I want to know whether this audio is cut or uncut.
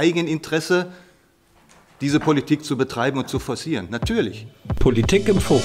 cut